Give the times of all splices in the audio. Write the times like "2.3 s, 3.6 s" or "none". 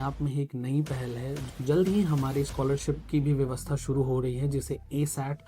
1.4 s